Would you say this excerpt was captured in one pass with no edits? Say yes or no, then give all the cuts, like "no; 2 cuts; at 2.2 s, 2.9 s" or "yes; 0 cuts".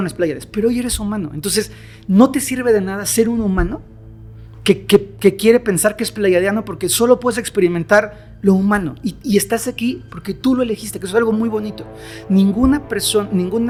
yes; 0 cuts